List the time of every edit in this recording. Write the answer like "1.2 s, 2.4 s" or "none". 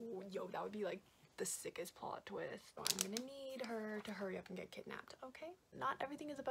2.7 s, 5.6 s

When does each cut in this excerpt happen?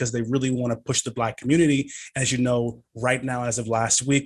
none

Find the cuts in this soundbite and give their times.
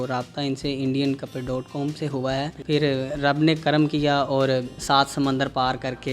2.5 s, 4.7 s

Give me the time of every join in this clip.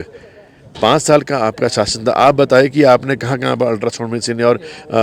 none

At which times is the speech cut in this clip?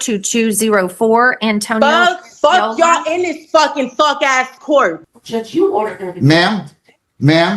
5.1 s

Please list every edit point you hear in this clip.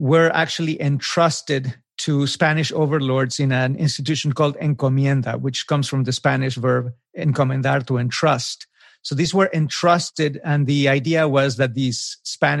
none

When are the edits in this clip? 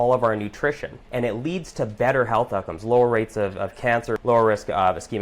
0.9 s, 4.2 s

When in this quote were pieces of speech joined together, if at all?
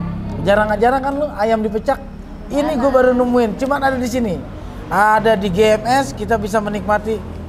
none

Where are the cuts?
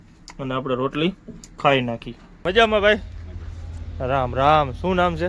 2.4 s

